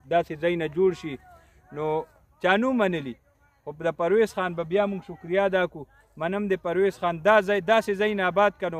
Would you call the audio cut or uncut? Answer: uncut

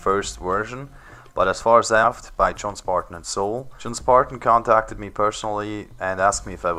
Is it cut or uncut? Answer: uncut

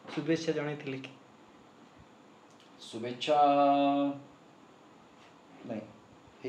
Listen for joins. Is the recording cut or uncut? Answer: uncut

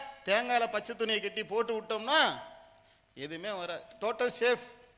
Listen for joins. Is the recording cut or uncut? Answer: uncut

